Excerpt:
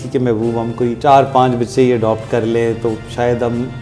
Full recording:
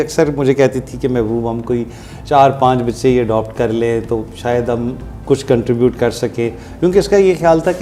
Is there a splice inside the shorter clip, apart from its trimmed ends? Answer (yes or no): yes